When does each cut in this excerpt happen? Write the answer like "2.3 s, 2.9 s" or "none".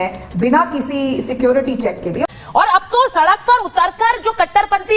2.2 s

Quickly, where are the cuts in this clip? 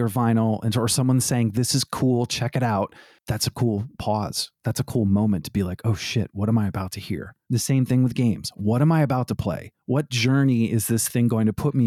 none

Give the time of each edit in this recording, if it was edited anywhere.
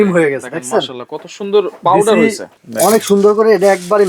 2.5 s

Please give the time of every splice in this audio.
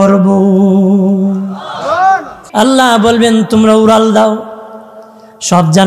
2.4 s

